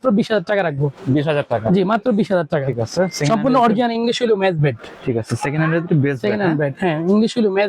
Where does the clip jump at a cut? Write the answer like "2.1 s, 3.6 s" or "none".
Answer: none